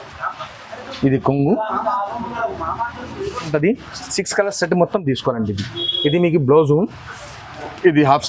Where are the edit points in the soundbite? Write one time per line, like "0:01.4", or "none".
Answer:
0:03.5